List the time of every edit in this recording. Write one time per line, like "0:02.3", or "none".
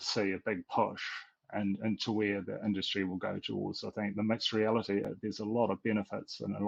0:05.1